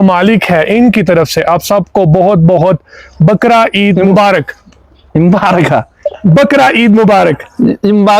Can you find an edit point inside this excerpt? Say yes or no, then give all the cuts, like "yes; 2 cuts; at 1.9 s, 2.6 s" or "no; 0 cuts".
no; 0 cuts